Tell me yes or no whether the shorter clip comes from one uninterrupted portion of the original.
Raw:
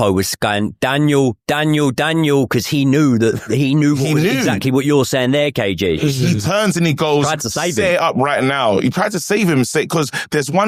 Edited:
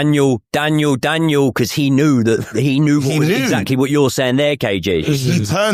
yes